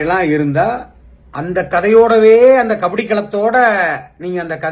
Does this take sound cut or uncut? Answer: uncut